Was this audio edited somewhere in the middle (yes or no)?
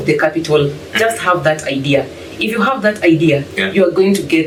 no